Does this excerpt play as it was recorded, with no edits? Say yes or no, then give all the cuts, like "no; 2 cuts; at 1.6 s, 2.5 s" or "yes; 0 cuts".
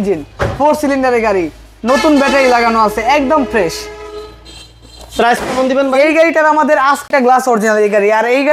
no; 1 cut; at 7.1 s